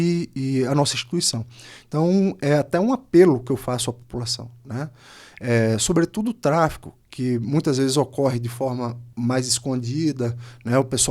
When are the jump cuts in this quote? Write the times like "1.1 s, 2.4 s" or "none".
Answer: 9.0 s